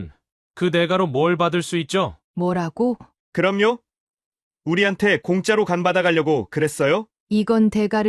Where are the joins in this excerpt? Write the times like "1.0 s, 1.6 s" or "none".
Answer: 2.2 s, 3.1 s, 7.2 s